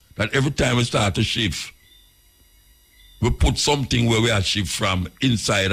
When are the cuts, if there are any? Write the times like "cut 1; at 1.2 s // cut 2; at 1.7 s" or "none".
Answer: none